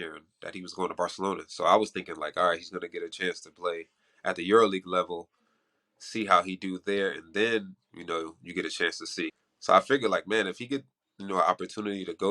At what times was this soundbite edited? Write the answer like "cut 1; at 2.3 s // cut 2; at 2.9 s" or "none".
cut 1; at 9.3 s